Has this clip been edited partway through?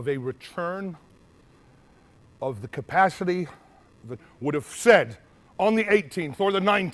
no; 0 cuts

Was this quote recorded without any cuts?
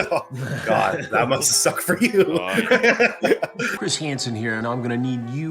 no; 1 cut; at 3.7 s

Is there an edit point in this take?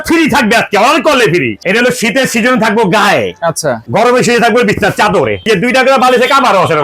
yes; 3 cuts; at 1.5 s, 3.8 s, 5.4 s

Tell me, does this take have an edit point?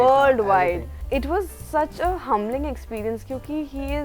no; 0 cuts

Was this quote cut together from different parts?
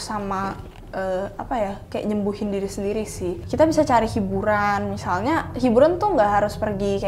yes; 1 cut; at 3.4 s

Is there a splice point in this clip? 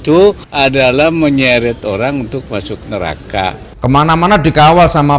yes; 1 cut; at 3.7 s

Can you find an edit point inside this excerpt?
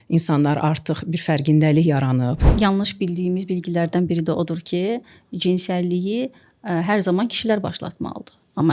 yes; 1 cut; at 2.5 s

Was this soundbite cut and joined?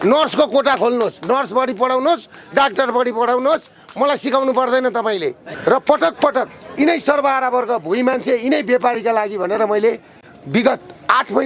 yes; 1 cut; at 5.5 s

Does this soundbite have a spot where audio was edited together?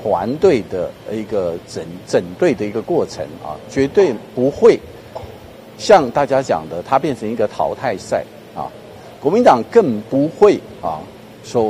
no; 0 cuts

